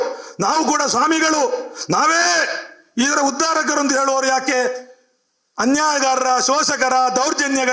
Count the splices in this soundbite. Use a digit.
0